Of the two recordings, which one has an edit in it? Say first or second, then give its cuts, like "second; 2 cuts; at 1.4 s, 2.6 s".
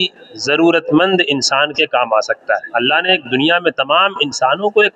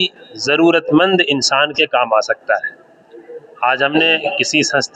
first; 1 cut; at 2.7 s